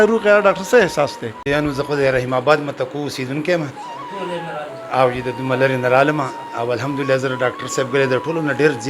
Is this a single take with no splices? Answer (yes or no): no